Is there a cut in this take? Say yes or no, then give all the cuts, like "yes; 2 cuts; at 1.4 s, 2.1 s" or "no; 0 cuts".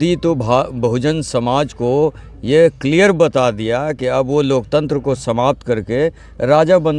no; 0 cuts